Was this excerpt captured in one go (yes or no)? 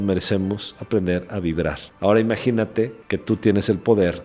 no